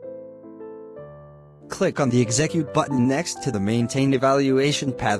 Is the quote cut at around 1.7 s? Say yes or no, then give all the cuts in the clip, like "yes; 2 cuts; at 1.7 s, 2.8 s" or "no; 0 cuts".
yes; 1 cut; at 1.7 s